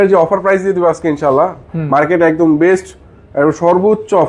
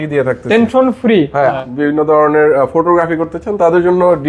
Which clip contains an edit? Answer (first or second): second